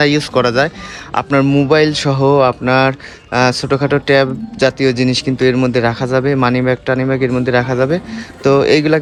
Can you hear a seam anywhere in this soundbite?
no; 0 cuts

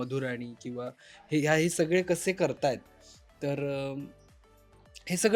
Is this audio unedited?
yes; 0 cuts

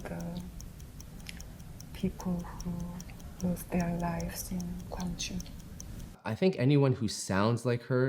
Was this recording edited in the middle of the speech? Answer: yes; 1 cut; at 6.2 s

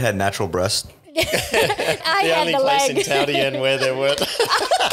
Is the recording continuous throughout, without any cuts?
no; 1 cut; at 2.0 s

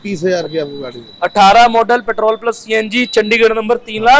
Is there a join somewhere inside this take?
no; 0 cuts

